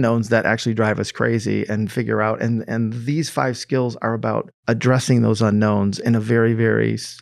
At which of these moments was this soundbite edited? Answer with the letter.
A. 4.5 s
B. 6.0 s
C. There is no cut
A